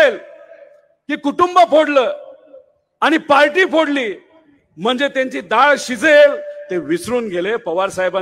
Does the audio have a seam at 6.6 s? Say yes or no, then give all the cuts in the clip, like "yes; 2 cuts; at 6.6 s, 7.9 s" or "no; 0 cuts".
no; 0 cuts